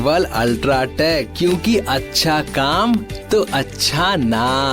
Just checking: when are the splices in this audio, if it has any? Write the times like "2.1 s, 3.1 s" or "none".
1.3 s